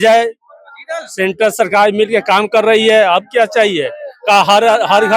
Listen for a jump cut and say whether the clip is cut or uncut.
uncut